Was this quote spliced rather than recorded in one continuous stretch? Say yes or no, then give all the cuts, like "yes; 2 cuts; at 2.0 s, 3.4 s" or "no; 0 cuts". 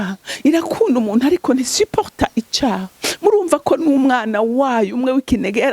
no; 0 cuts